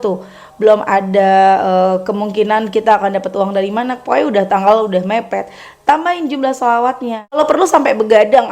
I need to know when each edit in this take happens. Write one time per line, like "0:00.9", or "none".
0:07.4